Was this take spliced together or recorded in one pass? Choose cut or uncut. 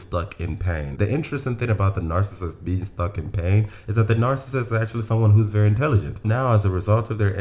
cut